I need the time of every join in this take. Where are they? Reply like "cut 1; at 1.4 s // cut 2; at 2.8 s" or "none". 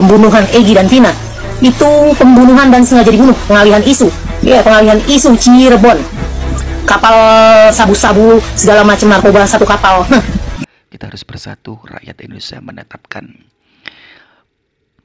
cut 1; at 10.6 s